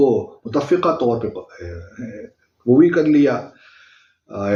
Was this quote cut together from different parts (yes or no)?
no